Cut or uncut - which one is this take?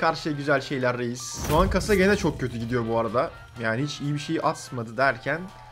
cut